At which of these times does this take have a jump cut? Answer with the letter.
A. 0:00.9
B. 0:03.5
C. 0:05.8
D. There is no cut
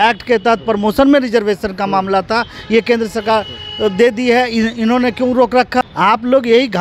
C